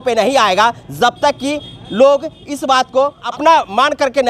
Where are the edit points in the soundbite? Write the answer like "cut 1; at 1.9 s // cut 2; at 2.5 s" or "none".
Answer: cut 1; at 3.2 s